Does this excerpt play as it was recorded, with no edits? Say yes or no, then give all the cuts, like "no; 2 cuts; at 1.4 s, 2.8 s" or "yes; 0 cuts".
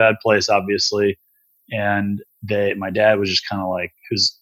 yes; 0 cuts